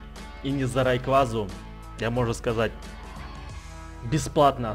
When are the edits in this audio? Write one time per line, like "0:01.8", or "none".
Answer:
none

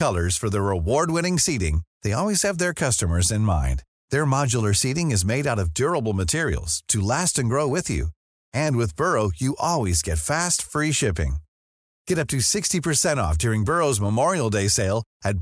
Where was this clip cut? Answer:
none

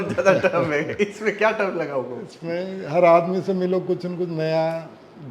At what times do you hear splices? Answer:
none

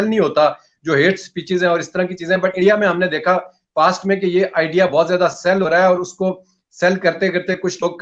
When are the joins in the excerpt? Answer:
none

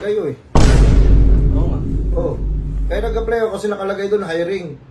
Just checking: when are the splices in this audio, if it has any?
none

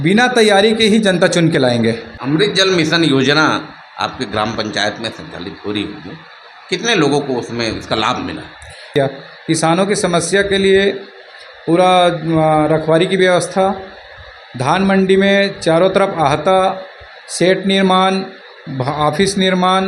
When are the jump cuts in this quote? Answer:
0:02.1
0:08.9

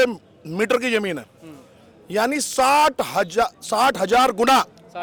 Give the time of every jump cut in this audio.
none

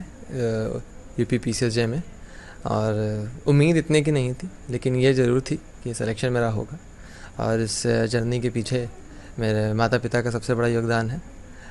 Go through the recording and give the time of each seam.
none

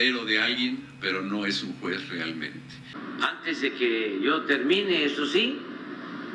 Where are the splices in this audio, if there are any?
0:03.0

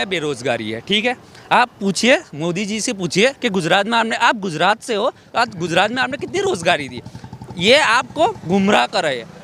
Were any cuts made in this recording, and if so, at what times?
none

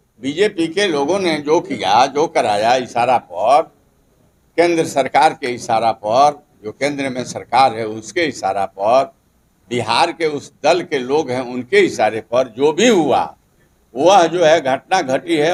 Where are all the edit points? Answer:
none

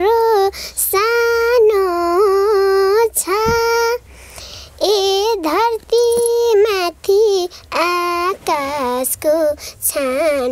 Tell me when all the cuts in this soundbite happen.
none

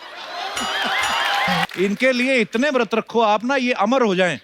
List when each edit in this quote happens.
0:01.7

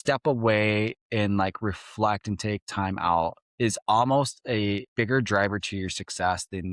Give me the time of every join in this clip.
0:03.4
0:04.9

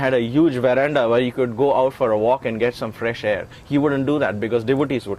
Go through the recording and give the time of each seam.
none

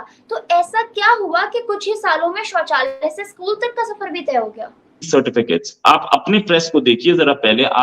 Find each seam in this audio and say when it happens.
0:05.1

